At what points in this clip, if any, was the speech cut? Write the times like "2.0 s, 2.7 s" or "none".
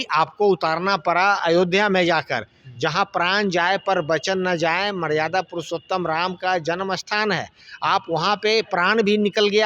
none